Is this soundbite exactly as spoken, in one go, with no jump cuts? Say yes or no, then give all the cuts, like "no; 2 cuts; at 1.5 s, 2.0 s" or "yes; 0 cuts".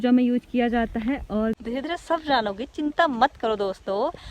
no; 1 cut; at 1.6 s